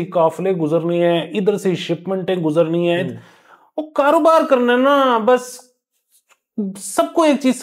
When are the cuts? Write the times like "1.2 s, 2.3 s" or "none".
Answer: none